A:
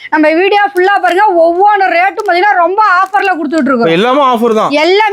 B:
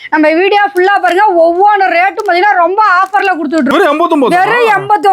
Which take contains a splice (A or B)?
B